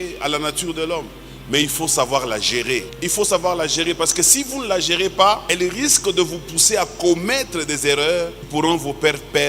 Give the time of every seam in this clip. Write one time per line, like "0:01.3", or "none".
0:02.9
0:05.5
0:08.4